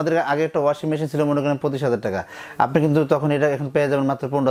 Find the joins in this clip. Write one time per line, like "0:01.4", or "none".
none